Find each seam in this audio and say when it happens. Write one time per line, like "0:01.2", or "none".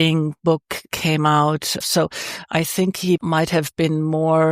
0:01.8
0:03.2